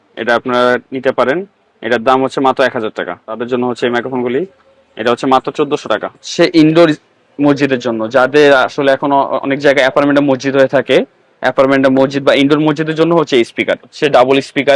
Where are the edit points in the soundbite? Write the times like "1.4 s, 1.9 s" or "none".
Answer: 3.3 s, 6.3 s, 13.9 s